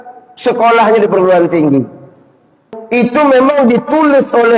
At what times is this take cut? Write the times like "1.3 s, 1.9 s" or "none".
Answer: 2.8 s